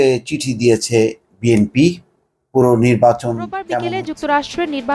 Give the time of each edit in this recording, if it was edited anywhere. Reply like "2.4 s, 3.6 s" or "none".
3.7 s